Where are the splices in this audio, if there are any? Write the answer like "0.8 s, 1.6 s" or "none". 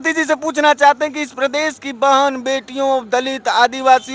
none